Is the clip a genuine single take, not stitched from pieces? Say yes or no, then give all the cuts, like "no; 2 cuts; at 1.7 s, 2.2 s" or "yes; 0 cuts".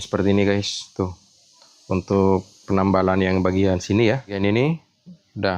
no; 1 cut; at 4.4 s